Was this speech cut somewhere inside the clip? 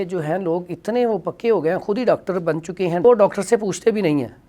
yes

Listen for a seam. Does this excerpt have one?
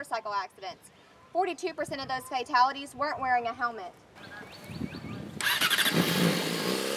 no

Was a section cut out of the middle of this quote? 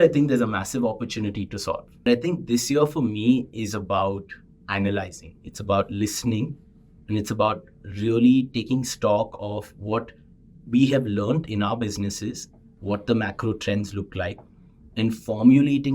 yes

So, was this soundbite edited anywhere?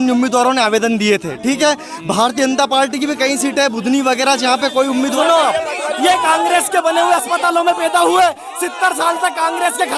yes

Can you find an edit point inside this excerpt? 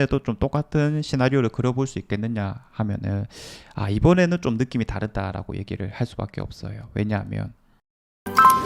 yes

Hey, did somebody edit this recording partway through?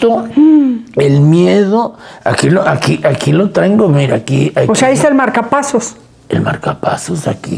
no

